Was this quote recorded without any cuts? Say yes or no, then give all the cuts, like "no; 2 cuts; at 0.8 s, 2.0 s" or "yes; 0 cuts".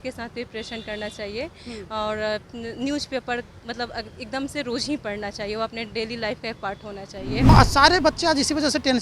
no; 1 cut; at 7.5 s